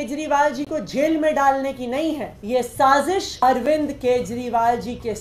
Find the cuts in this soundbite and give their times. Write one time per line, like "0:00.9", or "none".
0:02.3
0:03.3